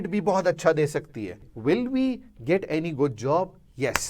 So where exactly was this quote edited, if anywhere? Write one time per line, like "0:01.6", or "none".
0:01.5

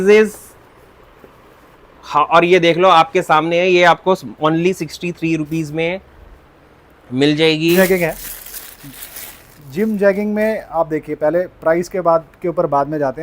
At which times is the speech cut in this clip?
0:07.8

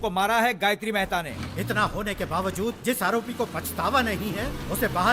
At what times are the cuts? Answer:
0:01.3

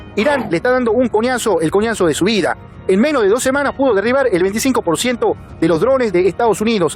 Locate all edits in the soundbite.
none

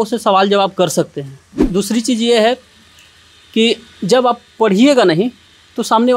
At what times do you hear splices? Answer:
0:01.6

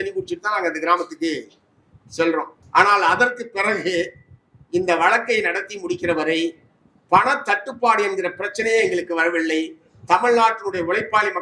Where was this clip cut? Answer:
0:02.5

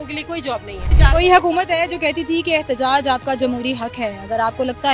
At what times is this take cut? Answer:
0:00.9

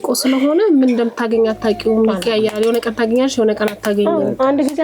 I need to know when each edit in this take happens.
none

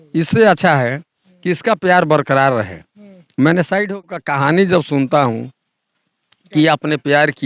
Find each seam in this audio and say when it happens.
0:04.3

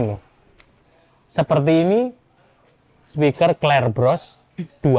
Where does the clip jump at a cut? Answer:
none

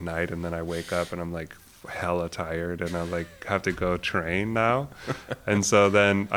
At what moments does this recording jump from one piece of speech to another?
none

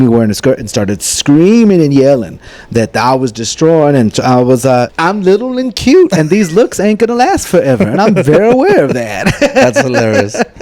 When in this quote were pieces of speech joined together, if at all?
0:04.9

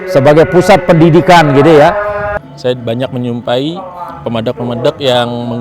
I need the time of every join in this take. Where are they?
0:02.2

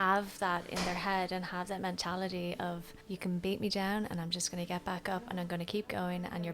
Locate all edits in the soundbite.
0:02.9

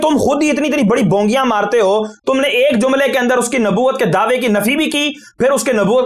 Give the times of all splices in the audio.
none

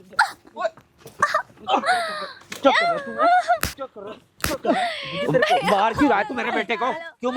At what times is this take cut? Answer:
none

